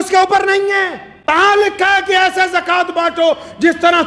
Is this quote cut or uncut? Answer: cut